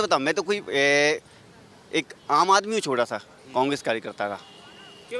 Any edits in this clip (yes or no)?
no